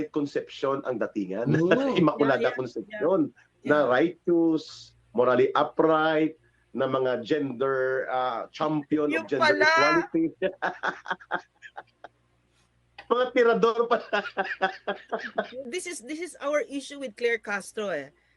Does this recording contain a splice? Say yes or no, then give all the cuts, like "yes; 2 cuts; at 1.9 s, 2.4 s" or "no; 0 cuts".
yes; 1 cut; at 15.6 s